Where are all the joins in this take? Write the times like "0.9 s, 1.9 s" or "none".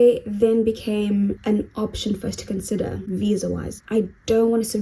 1.4 s, 3.7 s